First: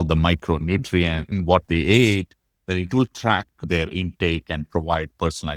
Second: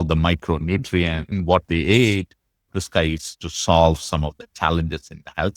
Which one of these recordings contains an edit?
second; 1 cut; at 2.6 s

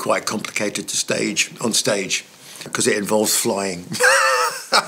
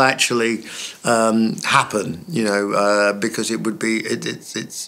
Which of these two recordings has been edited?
first; 1 cut; at 2.7 s

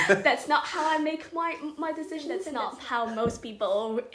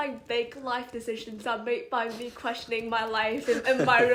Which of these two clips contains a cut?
first; 1 cut; at 2.5 s

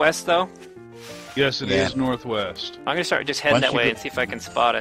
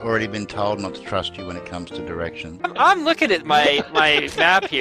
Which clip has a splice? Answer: second; 1 cut; at 2.7 s

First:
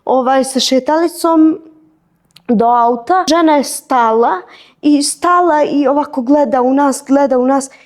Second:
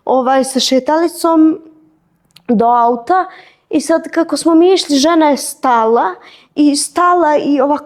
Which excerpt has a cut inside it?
first; 1 cut; at 3.3 s

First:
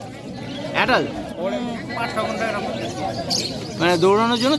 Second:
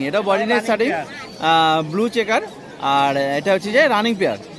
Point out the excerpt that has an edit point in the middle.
first; 1 cut; at 1.4 s

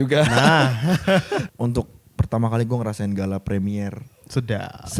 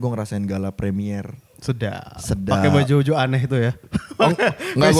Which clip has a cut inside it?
first; 1 cut; at 1.5 s

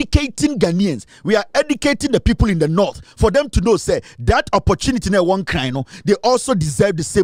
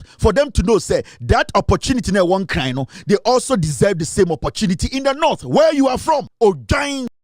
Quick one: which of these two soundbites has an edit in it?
second; 1 cut; at 6.3 s

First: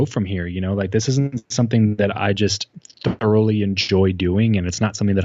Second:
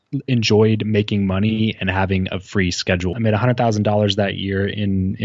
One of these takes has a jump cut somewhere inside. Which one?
second; 1 cut; at 3.1 s

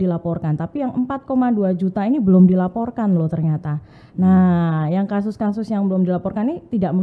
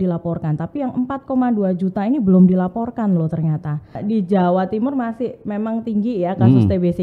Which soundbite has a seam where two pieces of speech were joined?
second; 1 cut; at 4.0 s

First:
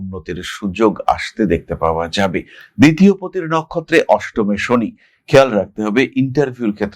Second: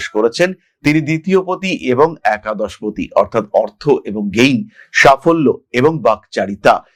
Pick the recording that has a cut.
first; 1 cut; at 2.6 s

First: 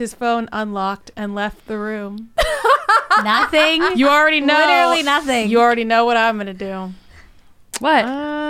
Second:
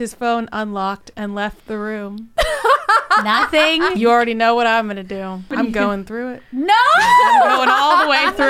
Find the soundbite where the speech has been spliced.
second; 2 cuts; at 3.9 s, 5.5 s

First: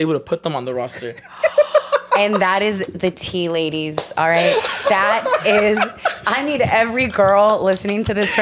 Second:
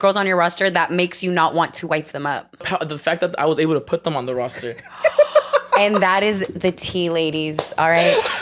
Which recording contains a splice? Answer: second; 1 cut; at 2.6 s

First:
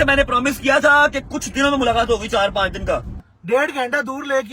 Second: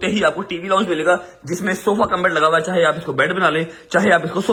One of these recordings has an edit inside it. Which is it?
first; 1 cut; at 3.3 s

